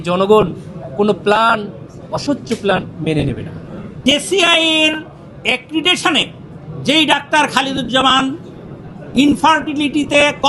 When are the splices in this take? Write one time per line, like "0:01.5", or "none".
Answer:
0:04.0